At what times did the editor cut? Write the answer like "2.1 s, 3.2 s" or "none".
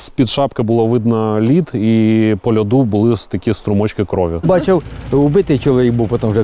4.4 s